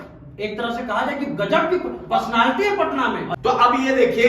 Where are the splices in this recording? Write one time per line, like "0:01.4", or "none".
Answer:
0:03.3